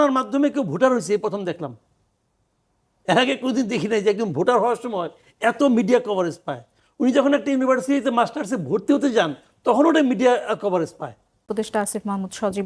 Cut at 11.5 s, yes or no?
yes